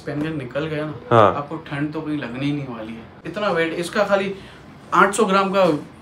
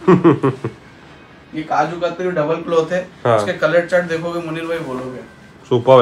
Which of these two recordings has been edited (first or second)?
first